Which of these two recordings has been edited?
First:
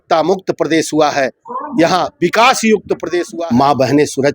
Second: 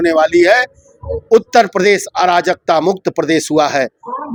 first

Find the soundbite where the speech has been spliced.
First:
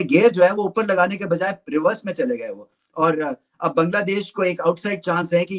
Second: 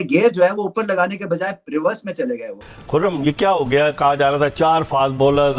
second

